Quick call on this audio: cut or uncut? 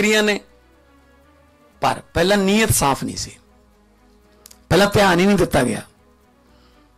cut